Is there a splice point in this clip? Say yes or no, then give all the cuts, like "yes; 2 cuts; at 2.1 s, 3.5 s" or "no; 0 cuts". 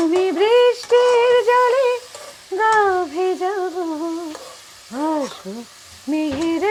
no; 0 cuts